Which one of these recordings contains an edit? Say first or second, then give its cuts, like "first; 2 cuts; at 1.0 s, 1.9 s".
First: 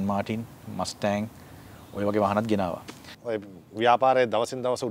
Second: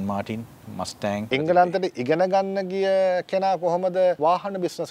second; 2 cuts; at 1.3 s, 4.2 s